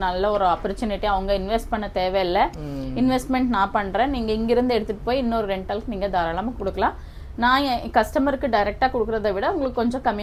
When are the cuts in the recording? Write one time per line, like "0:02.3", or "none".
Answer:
none